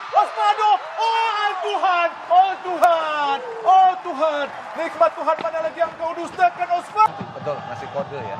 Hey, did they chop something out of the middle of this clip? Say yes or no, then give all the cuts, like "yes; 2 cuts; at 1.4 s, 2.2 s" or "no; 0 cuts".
yes; 1 cut; at 7.1 s